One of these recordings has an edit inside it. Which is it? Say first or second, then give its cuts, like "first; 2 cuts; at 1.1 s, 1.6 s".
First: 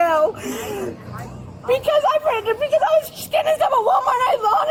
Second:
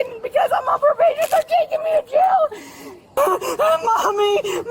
second; 1 cut; at 3.1 s